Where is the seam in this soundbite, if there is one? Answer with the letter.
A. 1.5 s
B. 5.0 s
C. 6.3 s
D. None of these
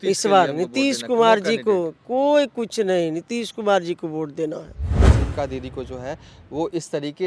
B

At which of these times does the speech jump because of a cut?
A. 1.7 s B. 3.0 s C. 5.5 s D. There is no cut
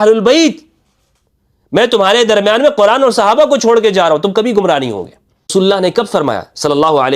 C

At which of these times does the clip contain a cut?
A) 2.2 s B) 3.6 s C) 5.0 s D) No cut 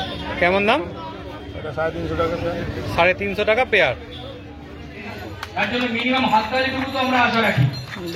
C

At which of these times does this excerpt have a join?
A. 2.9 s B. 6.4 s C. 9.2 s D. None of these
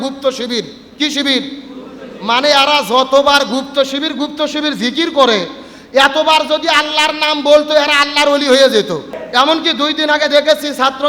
C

